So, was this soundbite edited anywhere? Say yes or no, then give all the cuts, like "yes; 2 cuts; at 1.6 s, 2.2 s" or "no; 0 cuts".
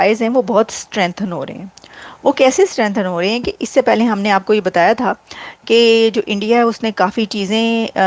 no; 0 cuts